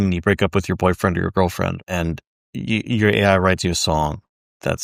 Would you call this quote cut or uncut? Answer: uncut